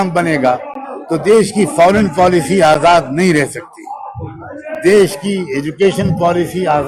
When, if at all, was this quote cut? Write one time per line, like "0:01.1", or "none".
none